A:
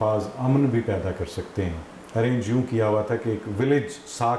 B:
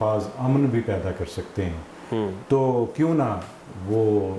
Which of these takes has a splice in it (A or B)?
A